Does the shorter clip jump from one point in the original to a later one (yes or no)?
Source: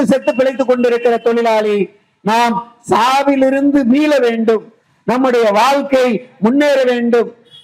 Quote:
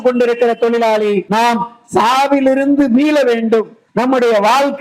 yes